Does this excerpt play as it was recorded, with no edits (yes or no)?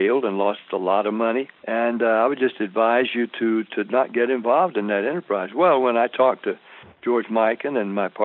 no